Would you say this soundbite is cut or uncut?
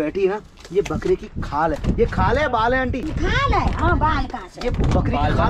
uncut